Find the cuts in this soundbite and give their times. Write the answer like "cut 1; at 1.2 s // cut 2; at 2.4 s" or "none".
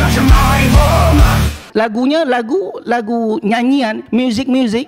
cut 1; at 1.6 s